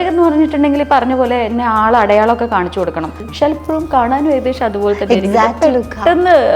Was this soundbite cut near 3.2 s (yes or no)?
yes